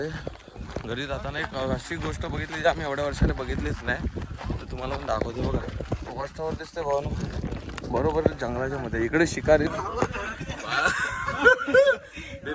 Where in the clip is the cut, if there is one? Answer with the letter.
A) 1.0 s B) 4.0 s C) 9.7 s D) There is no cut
C